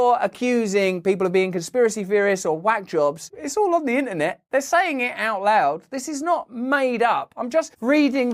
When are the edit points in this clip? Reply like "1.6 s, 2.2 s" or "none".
none